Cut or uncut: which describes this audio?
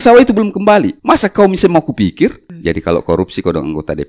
cut